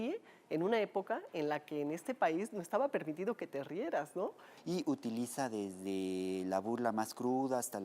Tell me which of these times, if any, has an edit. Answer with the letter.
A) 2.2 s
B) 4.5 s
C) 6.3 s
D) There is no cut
B